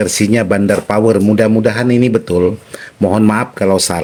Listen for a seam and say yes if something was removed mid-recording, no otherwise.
no